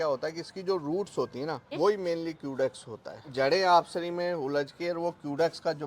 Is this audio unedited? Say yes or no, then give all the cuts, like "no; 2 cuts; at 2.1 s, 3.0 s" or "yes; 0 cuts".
no; 2 cuts; at 1.7 s, 3.3 s